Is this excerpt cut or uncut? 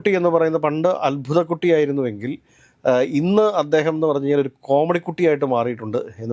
uncut